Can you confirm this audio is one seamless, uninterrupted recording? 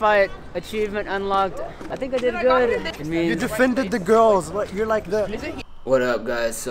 no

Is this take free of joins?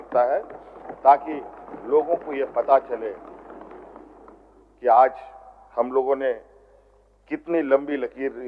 yes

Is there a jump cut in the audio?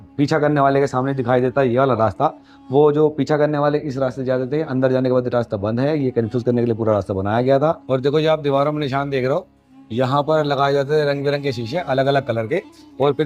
yes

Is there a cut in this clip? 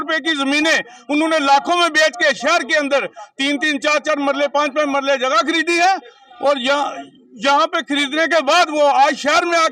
no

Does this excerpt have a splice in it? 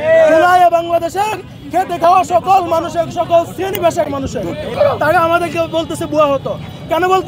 yes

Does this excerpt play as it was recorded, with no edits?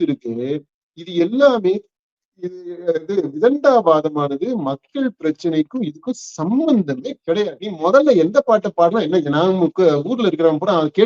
no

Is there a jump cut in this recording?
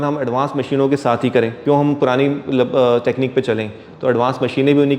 yes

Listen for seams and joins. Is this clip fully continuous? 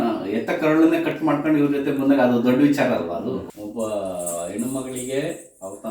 no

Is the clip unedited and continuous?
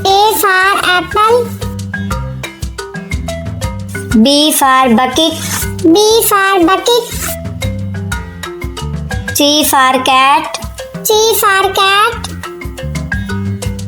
yes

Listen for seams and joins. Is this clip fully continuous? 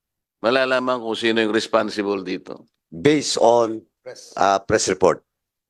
no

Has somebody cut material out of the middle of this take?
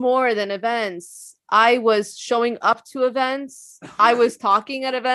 no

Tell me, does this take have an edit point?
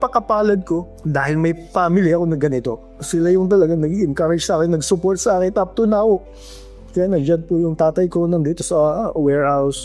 no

